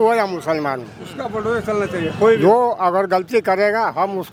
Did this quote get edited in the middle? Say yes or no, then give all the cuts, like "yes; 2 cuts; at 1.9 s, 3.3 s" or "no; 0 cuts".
no; 0 cuts